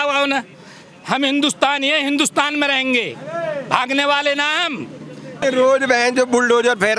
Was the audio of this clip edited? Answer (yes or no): yes